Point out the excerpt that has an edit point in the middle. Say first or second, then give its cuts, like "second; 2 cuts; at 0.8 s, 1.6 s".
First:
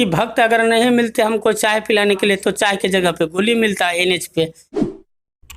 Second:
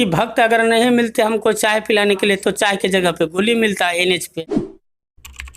second; 1 cut; at 4.3 s